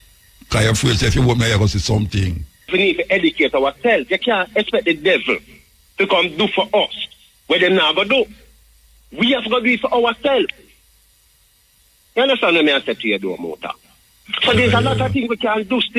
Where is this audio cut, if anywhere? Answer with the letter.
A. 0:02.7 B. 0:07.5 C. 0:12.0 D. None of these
A